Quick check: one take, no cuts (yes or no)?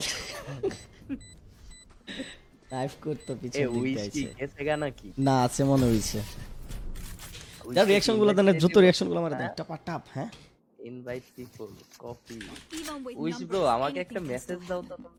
yes